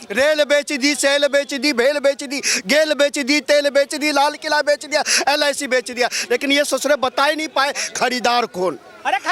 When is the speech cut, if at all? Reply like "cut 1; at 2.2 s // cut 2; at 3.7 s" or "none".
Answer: none